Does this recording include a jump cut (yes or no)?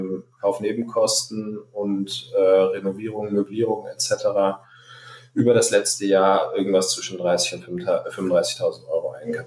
no